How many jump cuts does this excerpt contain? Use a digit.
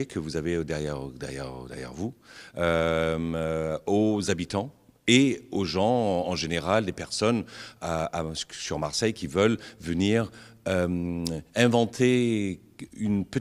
1